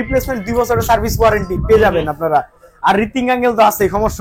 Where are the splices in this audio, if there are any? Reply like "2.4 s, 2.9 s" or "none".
none